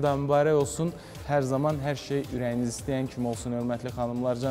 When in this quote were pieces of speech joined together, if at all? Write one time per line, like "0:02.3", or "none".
none

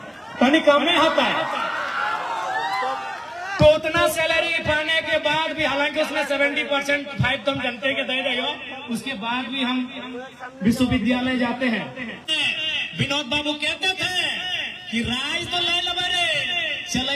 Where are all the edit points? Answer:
0:12.2

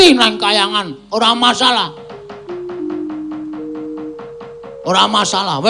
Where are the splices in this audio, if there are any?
none

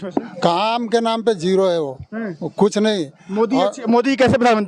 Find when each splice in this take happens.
none

